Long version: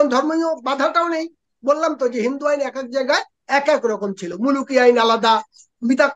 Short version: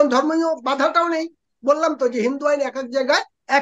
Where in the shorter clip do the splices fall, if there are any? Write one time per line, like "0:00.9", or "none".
none